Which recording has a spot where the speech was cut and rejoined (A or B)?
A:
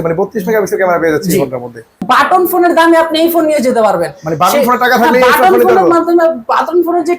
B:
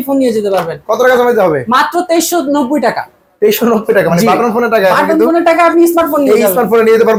A